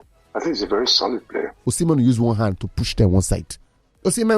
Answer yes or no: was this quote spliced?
yes